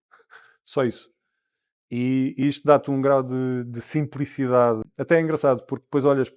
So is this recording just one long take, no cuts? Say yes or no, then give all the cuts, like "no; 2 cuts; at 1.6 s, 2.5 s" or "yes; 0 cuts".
no; 1 cut; at 4.9 s